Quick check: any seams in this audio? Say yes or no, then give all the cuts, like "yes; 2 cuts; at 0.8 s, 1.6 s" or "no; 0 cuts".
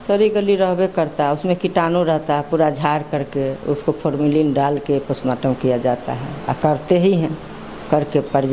no; 0 cuts